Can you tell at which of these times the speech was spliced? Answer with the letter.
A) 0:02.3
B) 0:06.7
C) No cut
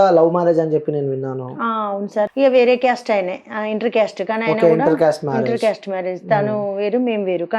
A